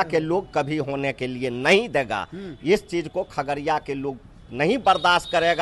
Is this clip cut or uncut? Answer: uncut